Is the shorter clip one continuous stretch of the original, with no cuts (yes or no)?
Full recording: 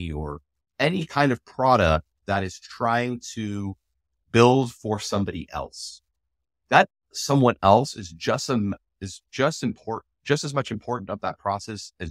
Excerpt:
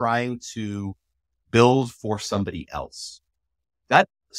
yes